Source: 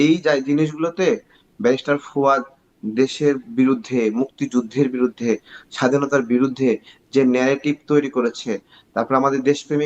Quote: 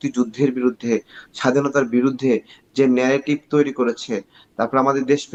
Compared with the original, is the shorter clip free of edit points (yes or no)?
yes